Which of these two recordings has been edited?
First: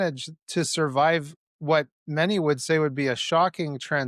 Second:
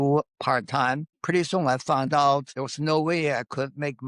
second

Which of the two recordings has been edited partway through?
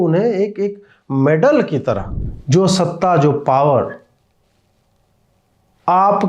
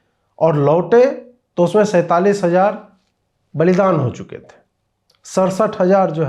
first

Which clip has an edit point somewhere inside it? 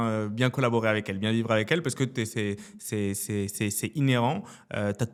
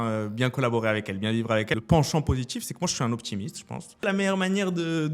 second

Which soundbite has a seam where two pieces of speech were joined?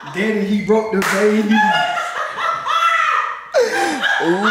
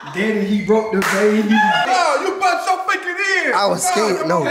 second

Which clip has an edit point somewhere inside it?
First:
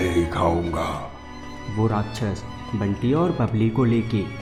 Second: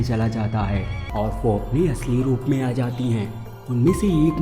second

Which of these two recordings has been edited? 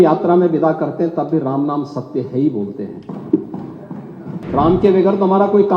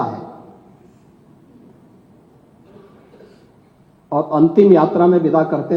first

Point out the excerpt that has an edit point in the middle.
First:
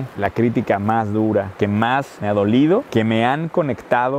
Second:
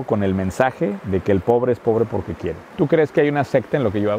second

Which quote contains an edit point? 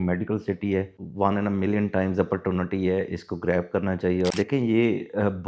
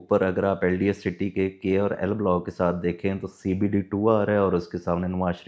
first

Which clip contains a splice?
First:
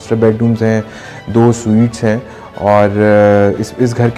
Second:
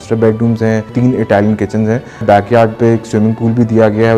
second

